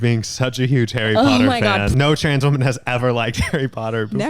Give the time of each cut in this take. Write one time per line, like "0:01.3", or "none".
0:01.9